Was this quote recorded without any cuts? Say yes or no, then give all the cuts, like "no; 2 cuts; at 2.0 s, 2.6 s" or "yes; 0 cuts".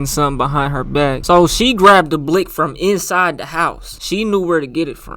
yes; 0 cuts